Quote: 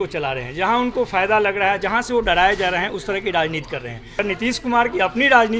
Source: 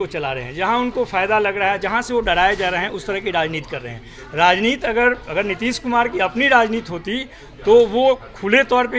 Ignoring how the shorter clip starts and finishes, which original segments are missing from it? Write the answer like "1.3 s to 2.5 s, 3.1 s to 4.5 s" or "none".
4.1 s to 5.3 s